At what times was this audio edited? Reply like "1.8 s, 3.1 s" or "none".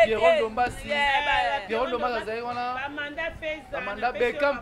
none